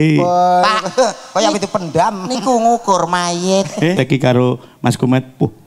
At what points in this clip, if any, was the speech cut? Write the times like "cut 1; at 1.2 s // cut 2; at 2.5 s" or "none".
cut 1; at 4.0 s